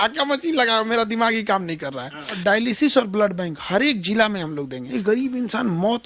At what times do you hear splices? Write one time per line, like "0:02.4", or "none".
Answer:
0:02.3
0:04.8